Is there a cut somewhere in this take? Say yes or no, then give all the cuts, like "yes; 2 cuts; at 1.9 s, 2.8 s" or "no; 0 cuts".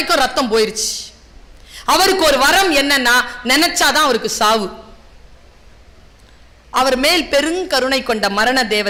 no; 0 cuts